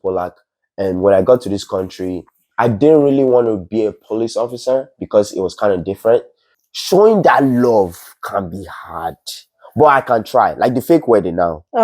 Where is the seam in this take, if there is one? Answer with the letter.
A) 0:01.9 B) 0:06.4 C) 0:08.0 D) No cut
B